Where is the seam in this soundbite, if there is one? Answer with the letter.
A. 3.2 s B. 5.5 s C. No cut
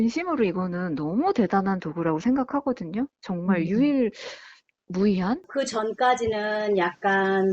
B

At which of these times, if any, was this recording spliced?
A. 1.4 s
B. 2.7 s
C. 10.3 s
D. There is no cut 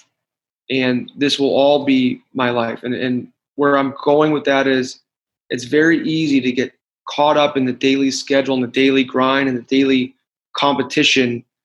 D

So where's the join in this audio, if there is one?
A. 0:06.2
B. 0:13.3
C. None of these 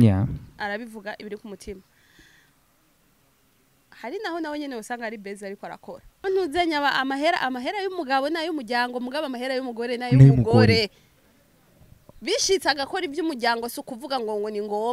A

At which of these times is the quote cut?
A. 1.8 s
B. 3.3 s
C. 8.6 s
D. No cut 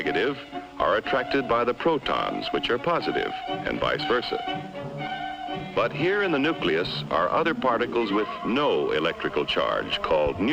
B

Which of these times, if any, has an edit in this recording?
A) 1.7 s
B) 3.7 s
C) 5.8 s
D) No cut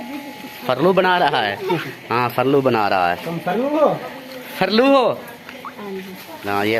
D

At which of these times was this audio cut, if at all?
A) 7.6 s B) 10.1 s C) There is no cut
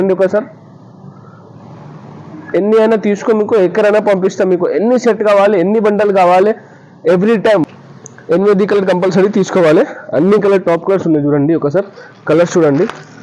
A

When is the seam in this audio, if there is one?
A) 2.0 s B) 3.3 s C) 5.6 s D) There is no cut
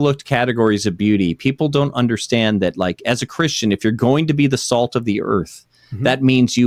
D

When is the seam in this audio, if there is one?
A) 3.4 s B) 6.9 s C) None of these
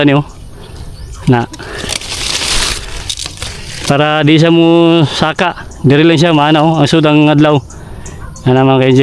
A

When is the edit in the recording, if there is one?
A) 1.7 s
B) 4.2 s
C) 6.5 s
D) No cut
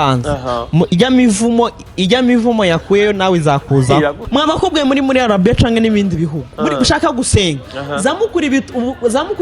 B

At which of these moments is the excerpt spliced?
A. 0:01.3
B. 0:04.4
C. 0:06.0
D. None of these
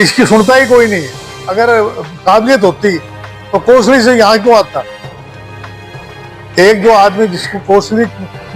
A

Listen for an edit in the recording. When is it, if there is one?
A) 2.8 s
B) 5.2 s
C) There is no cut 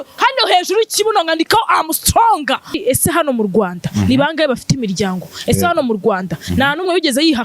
A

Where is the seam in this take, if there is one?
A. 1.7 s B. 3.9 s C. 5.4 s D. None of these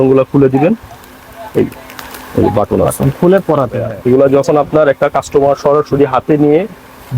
B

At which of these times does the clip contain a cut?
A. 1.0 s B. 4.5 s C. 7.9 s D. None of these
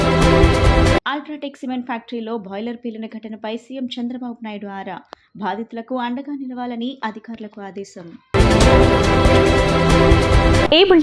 D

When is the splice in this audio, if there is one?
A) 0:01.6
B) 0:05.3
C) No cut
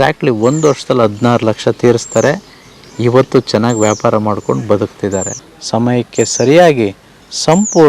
B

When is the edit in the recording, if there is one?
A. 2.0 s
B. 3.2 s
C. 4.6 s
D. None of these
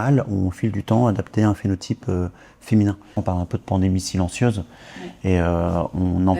B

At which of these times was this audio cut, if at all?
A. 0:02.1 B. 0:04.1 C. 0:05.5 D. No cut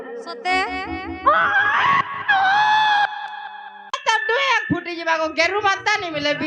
B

